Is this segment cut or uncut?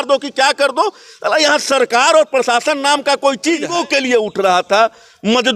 cut